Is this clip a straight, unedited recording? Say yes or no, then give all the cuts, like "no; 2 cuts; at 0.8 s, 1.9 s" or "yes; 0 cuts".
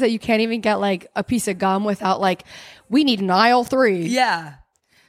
yes; 0 cuts